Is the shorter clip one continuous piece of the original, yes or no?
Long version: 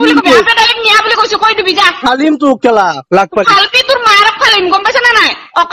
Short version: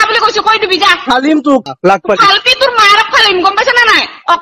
no